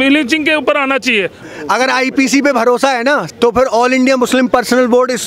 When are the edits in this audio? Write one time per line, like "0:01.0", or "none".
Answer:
0:01.4
0:03.3